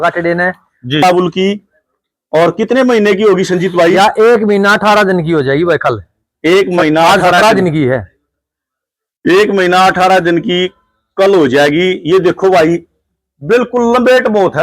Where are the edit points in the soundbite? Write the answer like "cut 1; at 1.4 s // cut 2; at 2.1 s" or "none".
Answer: cut 1; at 1.0 s